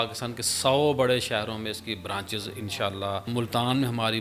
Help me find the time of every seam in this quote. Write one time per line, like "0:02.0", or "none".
0:03.3